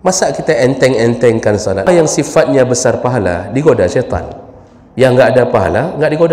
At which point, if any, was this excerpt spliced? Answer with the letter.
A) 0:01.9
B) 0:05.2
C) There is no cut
A